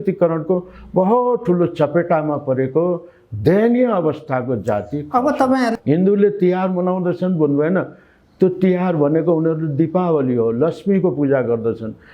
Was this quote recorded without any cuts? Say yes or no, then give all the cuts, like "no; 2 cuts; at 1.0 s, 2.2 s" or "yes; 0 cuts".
no; 1 cut; at 5.7 s